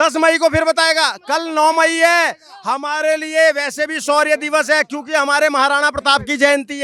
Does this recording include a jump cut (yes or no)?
no